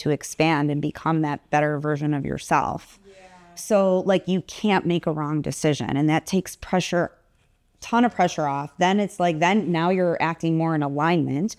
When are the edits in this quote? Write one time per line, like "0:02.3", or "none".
none

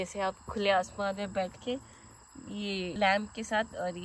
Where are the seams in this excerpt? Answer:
none

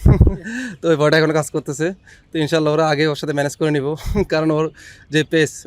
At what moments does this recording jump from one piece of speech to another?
none

